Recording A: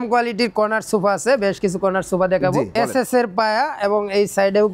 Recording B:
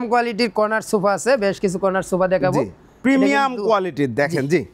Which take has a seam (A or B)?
A